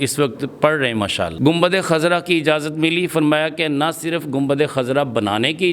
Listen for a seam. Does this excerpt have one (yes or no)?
yes